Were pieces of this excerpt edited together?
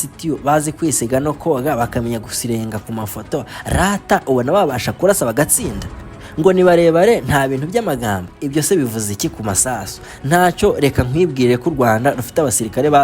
no; 0 cuts

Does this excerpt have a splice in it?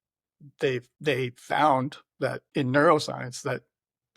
yes; 2 cuts; at 0.9 s, 2.4 s

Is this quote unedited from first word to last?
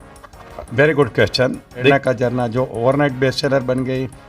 no; 1 cut; at 1.9 s

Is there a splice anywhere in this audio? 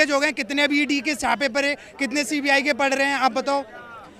no; 0 cuts

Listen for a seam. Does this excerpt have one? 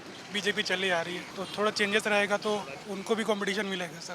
yes; 2 cuts; at 1.3 s, 2.8 s

